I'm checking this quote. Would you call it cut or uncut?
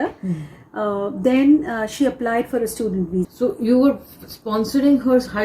cut